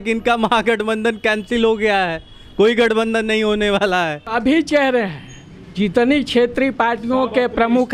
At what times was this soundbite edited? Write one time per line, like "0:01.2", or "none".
0:04.3